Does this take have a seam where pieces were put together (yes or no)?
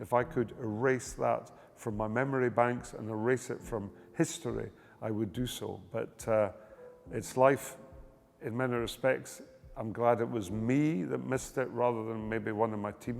no